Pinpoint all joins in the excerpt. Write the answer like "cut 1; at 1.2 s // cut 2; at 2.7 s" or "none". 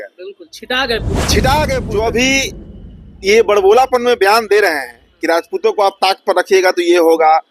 cut 1; at 1.9 s